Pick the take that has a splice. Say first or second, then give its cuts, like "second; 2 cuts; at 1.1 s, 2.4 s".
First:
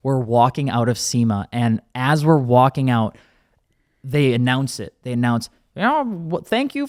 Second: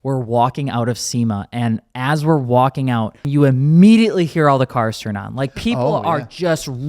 second; 1 cut; at 3.2 s